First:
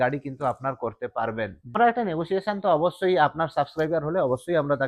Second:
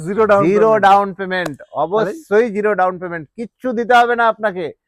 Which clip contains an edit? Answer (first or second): first